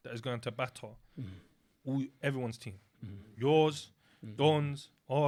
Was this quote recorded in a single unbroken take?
yes; 0 cuts

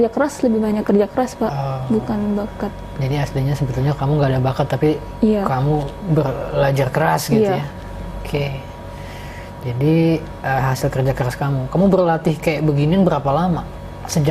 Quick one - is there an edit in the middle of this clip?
no; 0 cuts

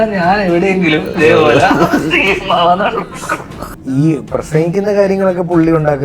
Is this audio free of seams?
no; 1 cut; at 3.6 s

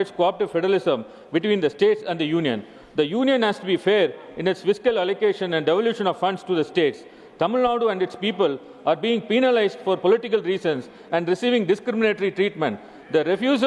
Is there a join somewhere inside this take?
no; 0 cuts

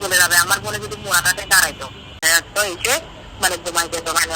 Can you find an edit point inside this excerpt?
yes; 1 cut; at 2.2 s

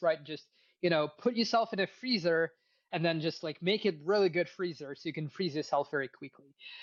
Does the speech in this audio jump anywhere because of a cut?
no; 0 cuts

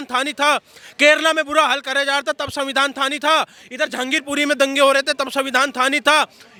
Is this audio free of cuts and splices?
yes; 0 cuts

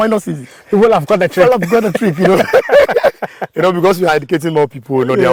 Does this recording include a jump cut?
no; 0 cuts

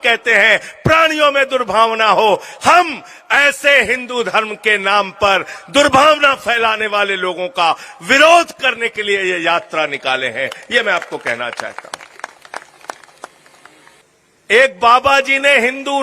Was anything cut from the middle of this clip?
yes; 1 cut; at 13.9 s

